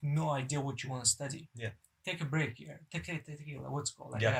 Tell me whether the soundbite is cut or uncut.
uncut